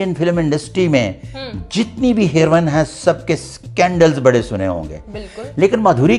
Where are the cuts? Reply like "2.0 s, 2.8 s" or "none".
none